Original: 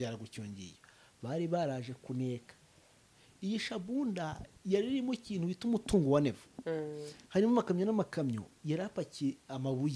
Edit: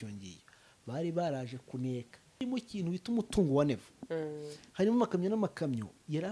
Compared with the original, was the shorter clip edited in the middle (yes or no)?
yes